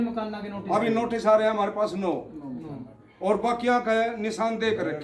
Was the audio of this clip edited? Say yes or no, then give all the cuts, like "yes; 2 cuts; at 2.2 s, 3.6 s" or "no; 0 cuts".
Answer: no; 0 cuts